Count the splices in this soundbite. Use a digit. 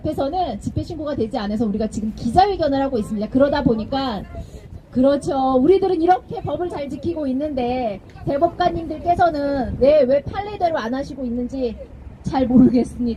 0